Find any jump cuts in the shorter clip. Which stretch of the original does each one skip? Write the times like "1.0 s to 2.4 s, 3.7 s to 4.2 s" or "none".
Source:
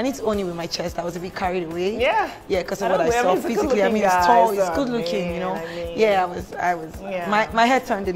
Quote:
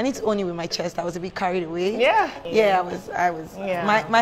2.4 s to 5.8 s